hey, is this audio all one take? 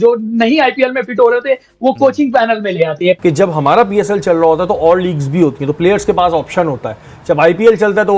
no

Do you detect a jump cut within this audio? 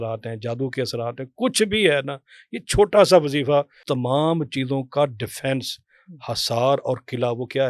yes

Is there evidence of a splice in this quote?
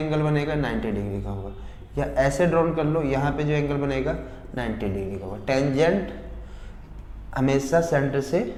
no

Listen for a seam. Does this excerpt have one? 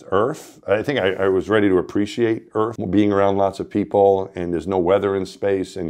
yes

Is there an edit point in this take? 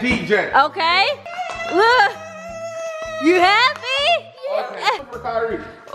yes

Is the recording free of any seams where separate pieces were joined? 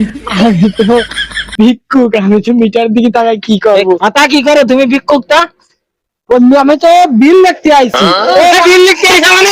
yes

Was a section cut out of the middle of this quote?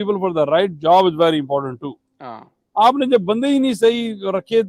no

